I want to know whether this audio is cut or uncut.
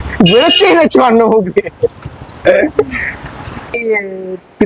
cut